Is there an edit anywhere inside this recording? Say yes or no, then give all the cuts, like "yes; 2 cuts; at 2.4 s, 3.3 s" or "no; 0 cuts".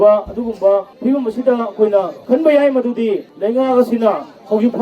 yes; 3 cuts; at 0.9 s, 2.2 s, 3.3 s